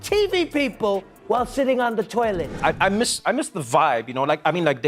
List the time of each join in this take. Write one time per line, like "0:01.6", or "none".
0:02.5